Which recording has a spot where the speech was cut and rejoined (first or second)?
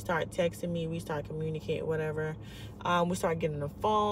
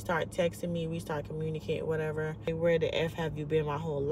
second